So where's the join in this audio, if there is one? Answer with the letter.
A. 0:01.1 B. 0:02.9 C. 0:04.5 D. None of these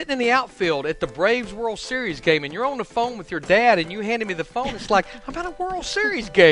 D